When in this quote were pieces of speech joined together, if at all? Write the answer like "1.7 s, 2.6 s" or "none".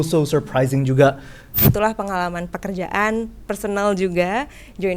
1.5 s